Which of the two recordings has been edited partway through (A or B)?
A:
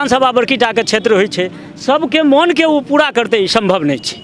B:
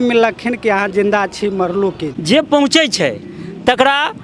B